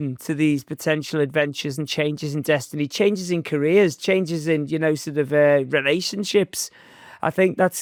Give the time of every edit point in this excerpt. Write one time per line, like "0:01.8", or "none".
none

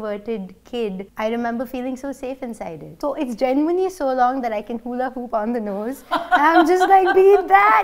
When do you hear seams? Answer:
0:01.1
0:02.9

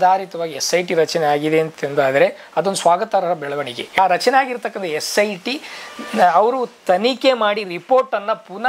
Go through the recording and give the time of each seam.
0:04.0

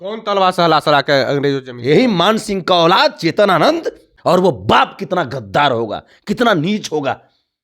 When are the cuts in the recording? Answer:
0:04.1

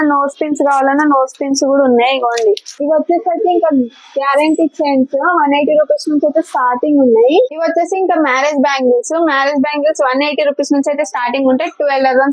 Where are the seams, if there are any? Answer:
0:02.7
0:07.5

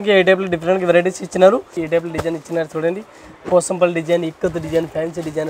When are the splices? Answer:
0:01.8

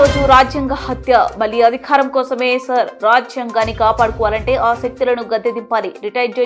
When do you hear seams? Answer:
none

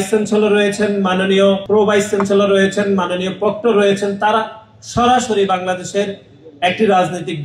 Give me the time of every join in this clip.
0:01.6

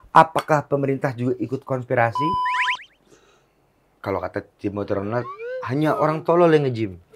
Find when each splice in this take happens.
0:02.4

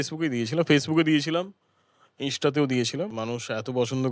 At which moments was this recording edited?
0:03.1

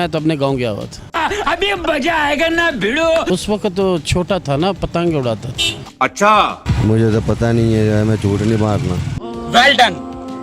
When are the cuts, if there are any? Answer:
0:03.3
0:06.6

